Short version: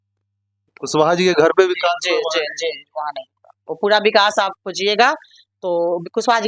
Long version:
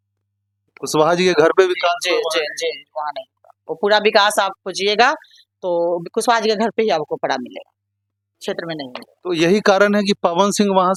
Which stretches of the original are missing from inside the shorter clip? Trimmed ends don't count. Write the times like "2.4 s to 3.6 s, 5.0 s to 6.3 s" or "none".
none